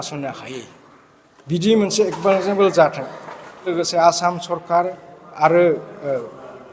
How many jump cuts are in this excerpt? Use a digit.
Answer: 1